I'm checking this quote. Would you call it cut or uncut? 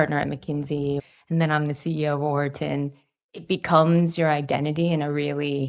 cut